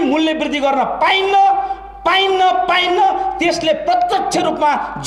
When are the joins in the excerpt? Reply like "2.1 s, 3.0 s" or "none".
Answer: none